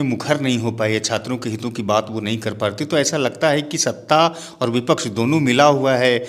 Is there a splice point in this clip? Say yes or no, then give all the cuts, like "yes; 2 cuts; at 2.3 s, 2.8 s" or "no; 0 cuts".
no; 0 cuts